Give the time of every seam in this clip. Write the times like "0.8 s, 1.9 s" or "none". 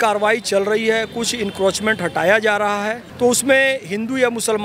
3.0 s